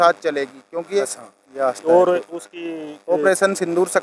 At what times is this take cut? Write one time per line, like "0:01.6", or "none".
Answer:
0:01.1